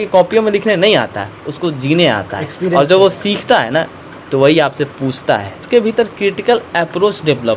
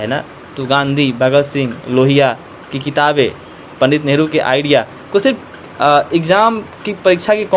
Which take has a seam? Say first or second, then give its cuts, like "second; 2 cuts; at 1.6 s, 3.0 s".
first; 1 cut; at 5.6 s